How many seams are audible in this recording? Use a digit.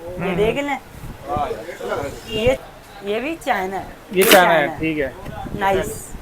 1